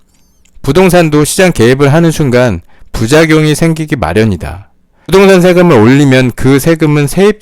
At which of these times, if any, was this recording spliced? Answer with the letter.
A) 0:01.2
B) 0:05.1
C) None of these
B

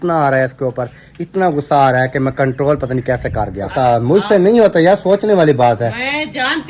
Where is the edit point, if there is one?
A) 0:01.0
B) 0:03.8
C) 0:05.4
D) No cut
B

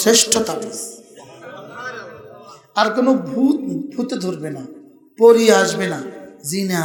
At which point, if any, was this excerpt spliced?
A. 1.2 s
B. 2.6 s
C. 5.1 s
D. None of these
D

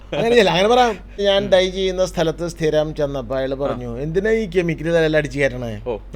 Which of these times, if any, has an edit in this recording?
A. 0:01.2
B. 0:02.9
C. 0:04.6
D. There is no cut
A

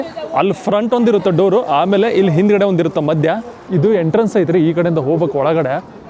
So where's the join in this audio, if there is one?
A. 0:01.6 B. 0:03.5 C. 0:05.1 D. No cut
B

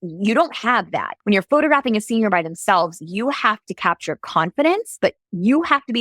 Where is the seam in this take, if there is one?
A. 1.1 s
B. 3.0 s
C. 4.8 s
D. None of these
A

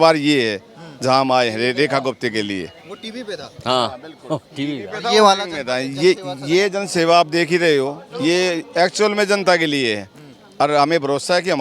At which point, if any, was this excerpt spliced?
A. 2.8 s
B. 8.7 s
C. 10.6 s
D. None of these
D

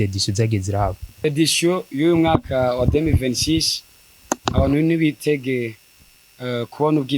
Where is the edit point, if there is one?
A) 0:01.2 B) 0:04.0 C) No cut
A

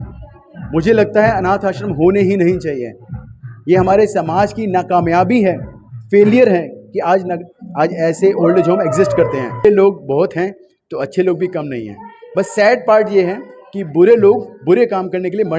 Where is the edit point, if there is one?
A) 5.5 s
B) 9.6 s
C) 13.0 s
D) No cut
B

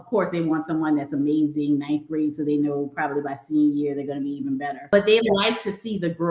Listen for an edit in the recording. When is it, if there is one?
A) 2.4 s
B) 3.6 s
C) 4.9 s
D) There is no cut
C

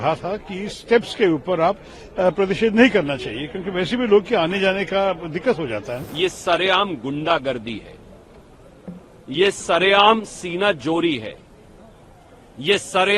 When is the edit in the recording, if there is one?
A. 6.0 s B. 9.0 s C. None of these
A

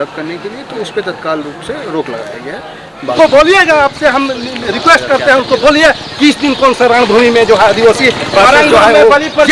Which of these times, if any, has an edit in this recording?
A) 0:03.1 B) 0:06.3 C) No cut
A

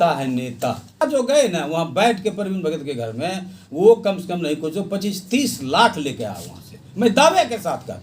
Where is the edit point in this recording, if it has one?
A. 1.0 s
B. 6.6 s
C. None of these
A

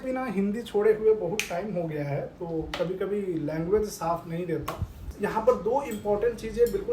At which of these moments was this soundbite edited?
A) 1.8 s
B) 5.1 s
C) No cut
B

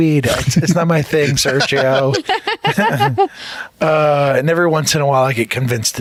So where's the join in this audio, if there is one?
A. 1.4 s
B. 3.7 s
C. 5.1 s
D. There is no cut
D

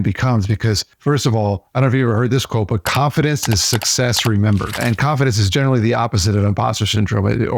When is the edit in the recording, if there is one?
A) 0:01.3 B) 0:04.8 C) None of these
B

